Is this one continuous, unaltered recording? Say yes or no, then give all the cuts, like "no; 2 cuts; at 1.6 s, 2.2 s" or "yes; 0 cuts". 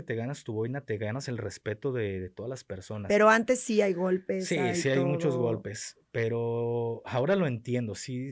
yes; 0 cuts